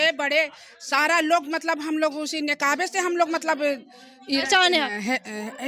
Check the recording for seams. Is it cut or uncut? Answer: uncut